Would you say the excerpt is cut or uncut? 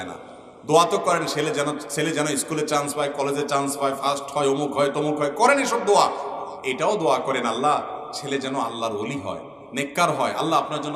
uncut